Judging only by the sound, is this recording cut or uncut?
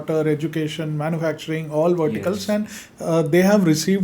uncut